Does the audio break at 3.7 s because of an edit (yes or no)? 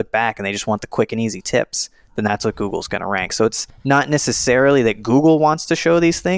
yes